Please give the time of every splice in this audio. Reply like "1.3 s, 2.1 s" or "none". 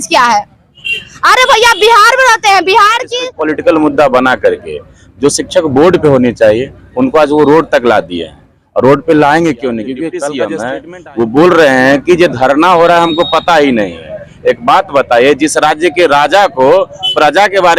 3.2 s, 10.3 s

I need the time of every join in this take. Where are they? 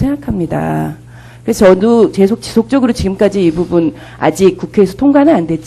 none

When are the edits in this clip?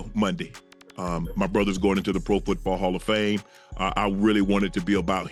none

